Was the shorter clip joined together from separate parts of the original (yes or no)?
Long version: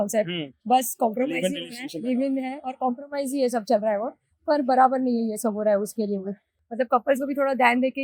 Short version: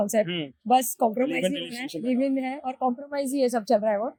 no